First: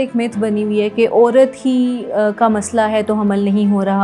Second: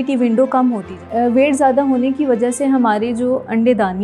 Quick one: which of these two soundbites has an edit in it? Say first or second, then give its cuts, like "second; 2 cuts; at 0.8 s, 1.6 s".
second; 1 cut; at 1.0 s